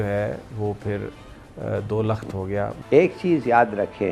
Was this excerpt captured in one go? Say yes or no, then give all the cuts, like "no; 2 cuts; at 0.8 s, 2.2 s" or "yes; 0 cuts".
no; 1 cut; at 2.7 s